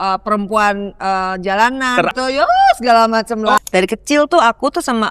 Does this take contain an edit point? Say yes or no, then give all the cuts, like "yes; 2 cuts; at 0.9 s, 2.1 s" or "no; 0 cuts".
yes; 2 cuts; at 2.1 s, 3.6 s